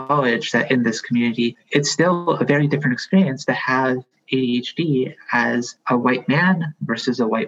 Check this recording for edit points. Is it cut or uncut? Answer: cut